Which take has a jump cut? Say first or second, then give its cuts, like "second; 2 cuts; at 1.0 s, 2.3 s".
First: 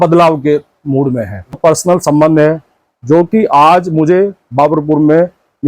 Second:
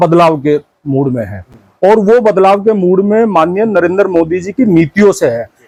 first; 1 cut; at 1.6 s